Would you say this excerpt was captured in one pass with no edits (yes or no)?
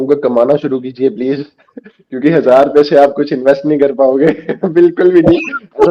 yes